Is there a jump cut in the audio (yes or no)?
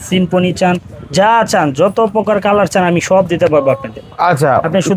no